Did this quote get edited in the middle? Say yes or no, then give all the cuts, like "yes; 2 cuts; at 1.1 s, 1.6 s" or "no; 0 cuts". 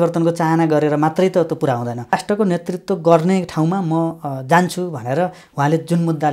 yes; 1 cut; at 2.2 s